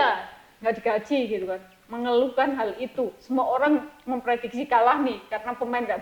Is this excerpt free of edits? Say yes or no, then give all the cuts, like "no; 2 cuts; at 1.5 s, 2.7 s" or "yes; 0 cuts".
yes; 0 cuts